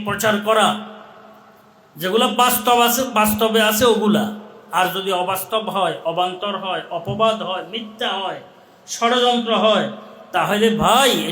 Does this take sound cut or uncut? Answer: uncut